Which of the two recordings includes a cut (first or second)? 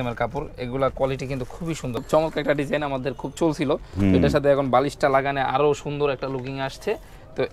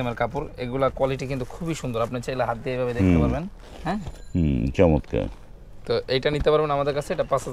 first